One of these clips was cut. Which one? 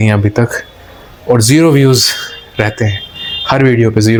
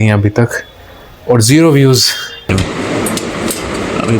second; 1 cut; at 2.5 s

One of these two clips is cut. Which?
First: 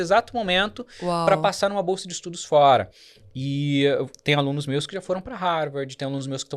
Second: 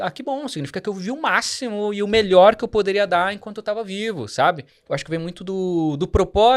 second; 1 cut; at 4.7 s

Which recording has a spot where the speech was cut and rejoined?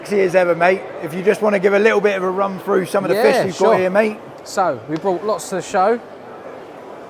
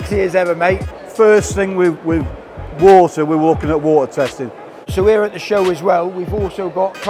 second; 2 cuts; at 1.0 s, 4.9 s

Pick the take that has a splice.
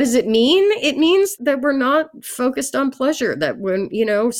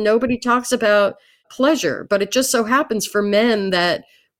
second; 1 cut; at 1.5 s

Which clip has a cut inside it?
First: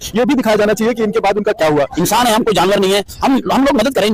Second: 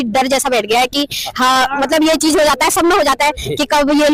first; 1 cut; at 1.9 s

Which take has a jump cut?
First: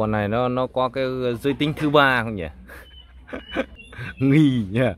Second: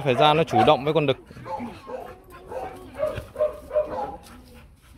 first; 1 cut; at 3.7 s

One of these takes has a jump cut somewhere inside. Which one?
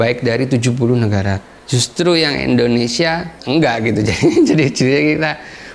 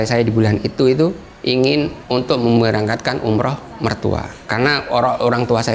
first; 1 cut; at 1.5 s

